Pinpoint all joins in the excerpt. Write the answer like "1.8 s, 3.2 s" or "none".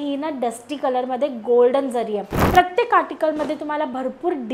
2.4 s